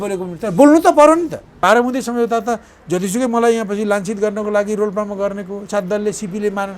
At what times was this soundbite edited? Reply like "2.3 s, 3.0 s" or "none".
1.6 s